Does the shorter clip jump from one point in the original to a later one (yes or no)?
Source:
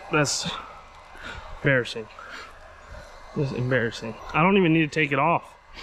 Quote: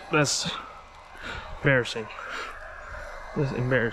no